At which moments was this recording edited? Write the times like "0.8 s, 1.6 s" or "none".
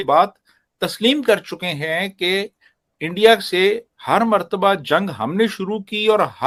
none